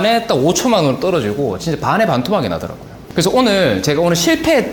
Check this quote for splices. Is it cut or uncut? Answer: cut